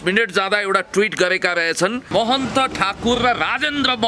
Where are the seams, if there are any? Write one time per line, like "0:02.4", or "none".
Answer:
0:02.1